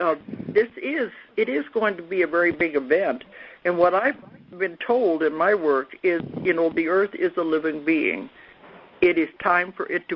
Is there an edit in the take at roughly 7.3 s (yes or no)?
no